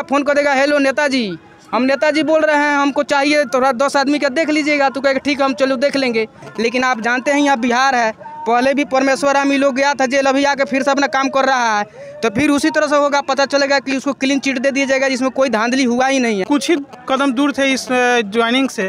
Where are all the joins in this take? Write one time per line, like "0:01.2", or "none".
0:06.4
0:16.4